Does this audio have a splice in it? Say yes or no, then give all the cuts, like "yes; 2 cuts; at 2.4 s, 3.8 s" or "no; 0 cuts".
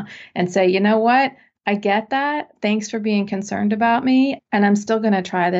yes; 1 cut; at 4.4 s